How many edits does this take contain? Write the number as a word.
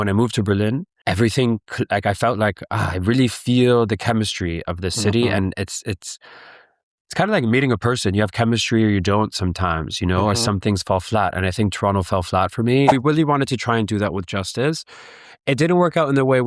two